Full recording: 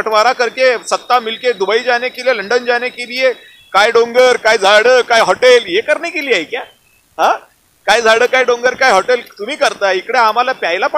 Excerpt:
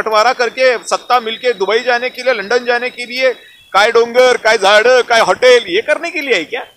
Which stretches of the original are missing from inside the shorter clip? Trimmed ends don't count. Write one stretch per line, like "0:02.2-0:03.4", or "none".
none